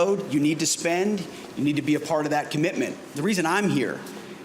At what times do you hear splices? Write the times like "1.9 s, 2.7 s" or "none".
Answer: 3.2 s

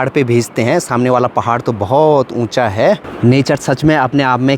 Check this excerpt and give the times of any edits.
3.1 s

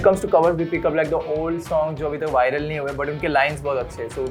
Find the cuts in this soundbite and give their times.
none

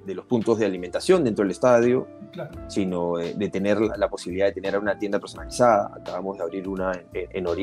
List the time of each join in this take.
none

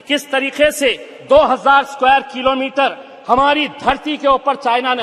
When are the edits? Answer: none

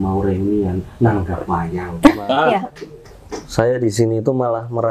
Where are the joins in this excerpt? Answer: 2.5 s

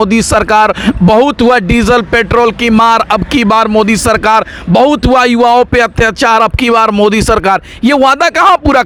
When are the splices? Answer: none

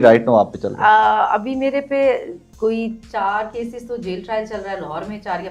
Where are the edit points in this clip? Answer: none

